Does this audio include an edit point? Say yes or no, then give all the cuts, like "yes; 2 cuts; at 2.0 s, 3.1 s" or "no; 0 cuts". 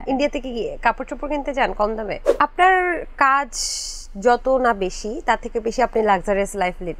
yes; 1 cut; at 2.3 s